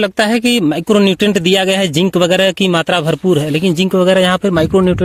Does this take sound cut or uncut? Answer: uncut